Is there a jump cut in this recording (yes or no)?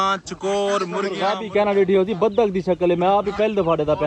yes